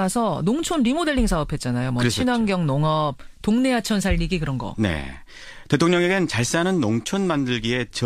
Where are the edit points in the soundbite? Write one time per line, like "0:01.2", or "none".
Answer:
none